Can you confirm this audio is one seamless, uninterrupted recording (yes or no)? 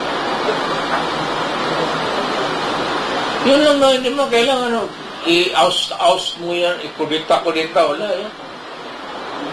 no